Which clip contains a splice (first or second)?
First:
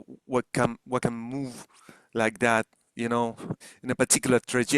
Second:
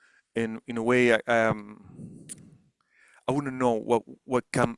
first